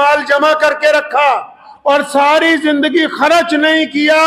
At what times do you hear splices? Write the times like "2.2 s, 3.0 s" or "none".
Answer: 1.7 s

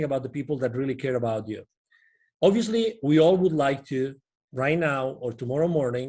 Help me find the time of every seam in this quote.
none

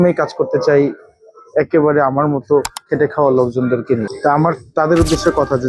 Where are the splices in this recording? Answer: 4.1 s

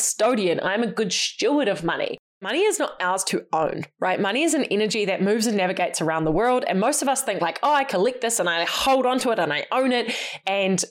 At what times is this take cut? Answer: 2.5 s

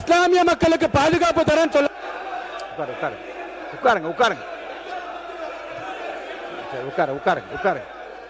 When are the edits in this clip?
none

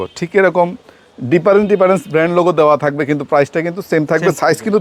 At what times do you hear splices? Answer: none

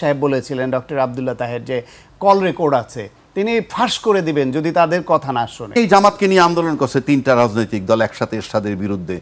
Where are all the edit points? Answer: 5.8 s

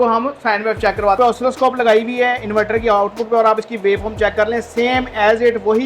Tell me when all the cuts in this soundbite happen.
1.2 s

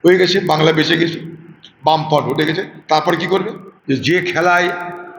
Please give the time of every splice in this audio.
3.7 s

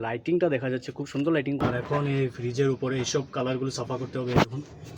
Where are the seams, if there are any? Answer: 1.6 s

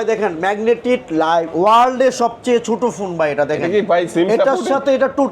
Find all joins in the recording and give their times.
none

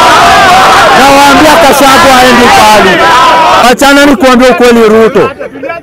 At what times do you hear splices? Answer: 3.6 s

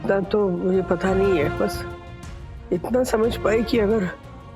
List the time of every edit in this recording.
none

